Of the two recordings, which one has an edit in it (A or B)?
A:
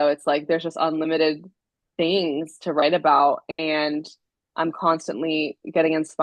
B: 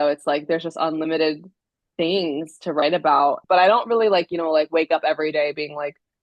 B